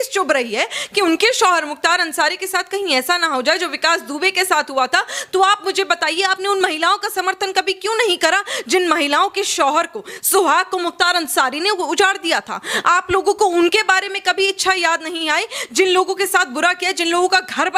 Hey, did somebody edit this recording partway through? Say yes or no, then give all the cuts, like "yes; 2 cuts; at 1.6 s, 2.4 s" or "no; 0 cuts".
no; 0 cuts